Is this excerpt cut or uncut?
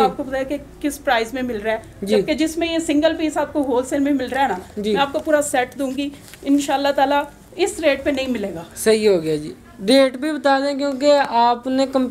uncut